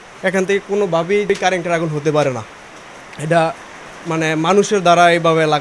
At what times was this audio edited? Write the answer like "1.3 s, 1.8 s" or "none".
1.3 s